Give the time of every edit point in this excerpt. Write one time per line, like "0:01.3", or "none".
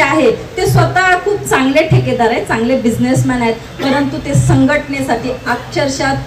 none

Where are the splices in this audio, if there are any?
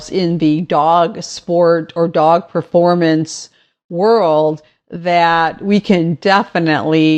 none

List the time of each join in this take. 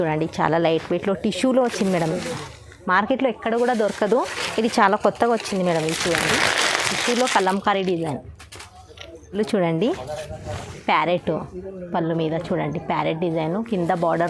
none

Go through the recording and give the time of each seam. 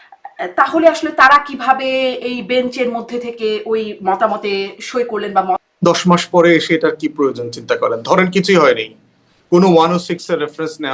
0:05.6

